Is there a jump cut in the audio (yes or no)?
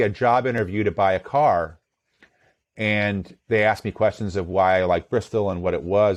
no